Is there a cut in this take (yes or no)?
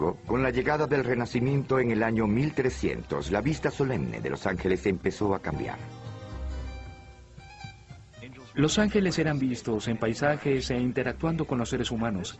yes